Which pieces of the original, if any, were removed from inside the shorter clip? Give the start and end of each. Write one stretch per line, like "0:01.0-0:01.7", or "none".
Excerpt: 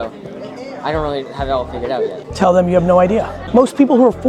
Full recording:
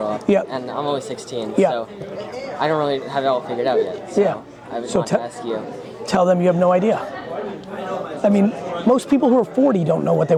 0:04.0-0:06.0
0:07.1-0:08.7

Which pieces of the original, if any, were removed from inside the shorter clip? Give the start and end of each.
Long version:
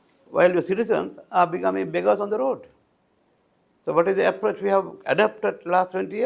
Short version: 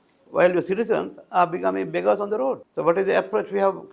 0:02.7-0:03.8

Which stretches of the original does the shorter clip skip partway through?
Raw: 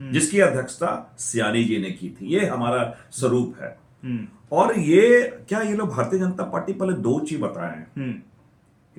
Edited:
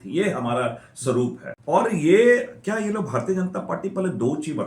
0:03.7-0:04.3

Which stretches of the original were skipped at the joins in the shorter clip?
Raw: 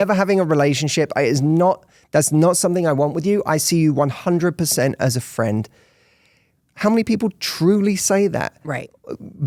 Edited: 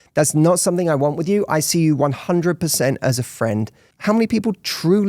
0:05.8-0:06.6

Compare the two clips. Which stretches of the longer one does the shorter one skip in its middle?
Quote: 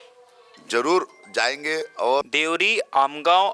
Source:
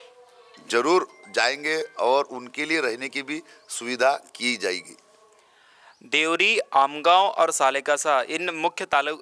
0:02.3-0:06.1

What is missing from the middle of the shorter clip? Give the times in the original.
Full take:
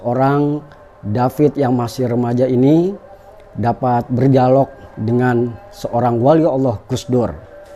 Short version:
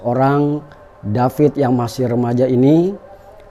none

